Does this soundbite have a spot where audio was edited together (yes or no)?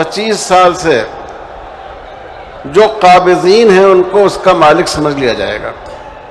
no